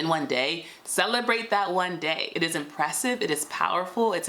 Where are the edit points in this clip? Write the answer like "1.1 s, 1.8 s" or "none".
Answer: 2.3 s